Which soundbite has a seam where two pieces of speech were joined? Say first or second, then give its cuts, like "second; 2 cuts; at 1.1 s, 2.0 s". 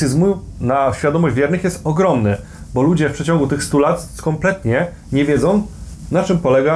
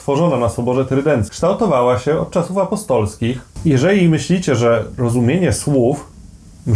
second; 2 cuts; at 1.3 s, 3.5 s